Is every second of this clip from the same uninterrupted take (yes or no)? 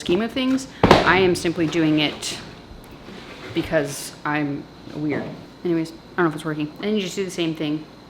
no